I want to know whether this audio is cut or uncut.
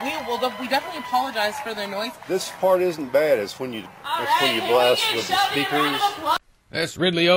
cut